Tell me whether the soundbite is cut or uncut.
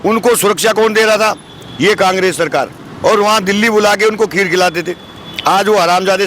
uncut